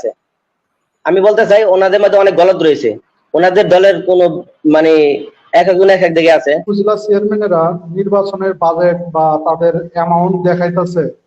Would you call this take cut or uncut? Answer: cut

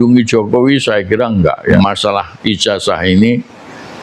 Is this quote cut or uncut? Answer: cut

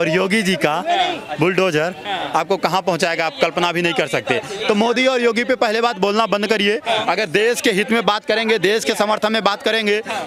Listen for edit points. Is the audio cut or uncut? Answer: uncut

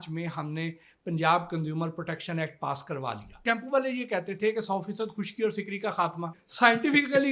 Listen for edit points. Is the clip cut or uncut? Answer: cut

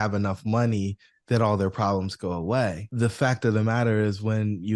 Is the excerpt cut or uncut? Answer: cut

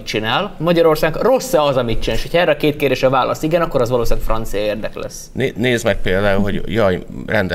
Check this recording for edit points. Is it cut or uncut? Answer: uncut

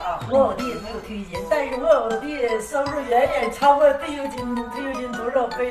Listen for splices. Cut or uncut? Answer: uncut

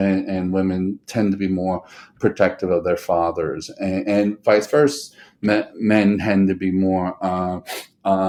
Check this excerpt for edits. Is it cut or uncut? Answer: uncut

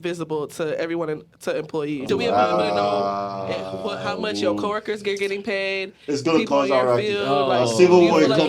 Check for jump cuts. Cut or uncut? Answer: cut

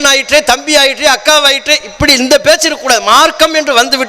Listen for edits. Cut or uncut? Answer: uncut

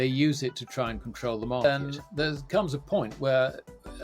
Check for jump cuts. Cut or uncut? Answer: cut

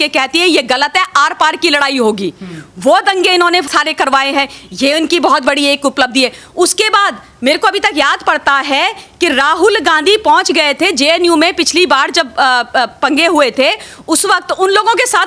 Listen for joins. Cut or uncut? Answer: uncut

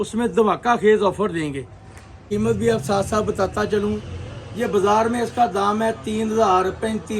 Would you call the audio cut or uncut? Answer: cut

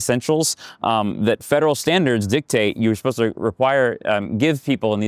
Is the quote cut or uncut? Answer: uncut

